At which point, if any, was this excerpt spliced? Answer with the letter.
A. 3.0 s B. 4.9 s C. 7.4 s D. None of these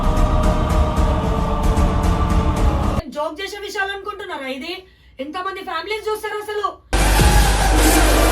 A